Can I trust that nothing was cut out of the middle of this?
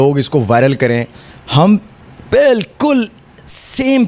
yes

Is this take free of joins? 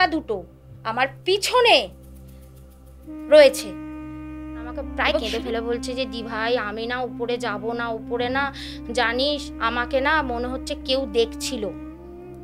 no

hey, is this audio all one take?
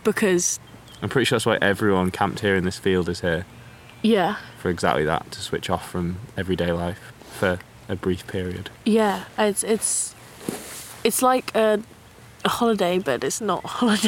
yes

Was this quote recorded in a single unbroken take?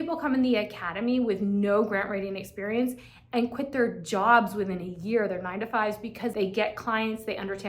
no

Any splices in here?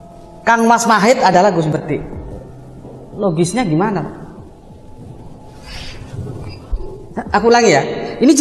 yes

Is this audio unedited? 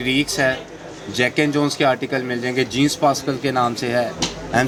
yes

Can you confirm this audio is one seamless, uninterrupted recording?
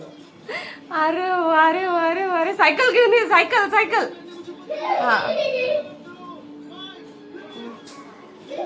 yes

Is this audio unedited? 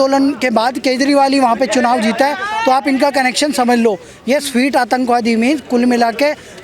yes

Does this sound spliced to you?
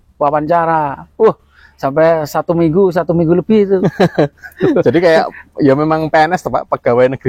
no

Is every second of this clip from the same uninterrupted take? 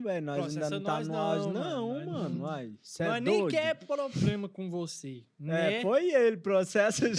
yes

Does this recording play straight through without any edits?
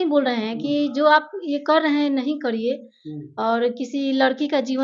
yes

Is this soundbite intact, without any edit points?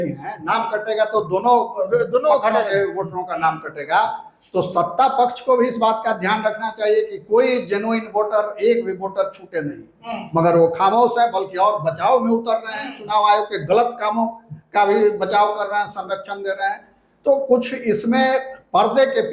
yes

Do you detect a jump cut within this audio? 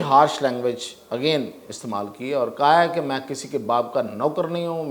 no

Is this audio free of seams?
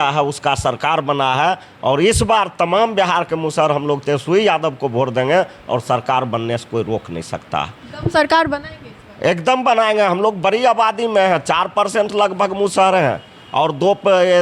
yes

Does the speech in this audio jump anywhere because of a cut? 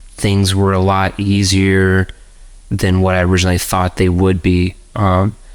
no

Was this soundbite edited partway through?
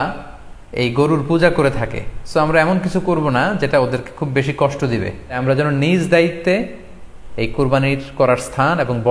yes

